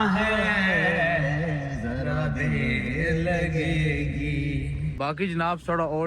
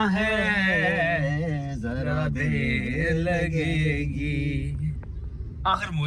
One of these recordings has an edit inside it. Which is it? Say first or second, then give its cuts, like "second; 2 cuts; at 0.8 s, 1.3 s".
first; 1 cut; at 4.8 s